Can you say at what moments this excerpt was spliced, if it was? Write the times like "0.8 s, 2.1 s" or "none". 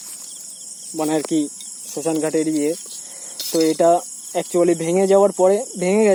none

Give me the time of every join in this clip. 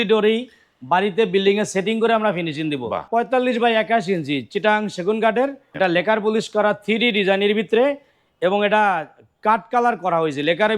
3.0 s, 5.6 s

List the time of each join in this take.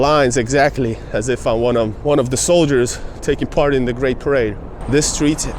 2.0 s, 4.6 s

